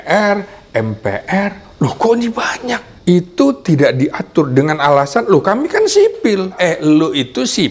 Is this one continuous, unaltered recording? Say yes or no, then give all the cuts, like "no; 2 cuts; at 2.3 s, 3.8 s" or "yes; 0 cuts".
no; 2 cuts; at 2.9 s, 6.5 s